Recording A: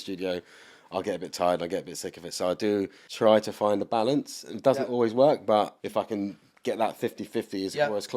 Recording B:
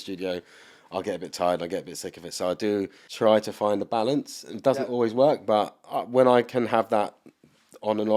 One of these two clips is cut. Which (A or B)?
A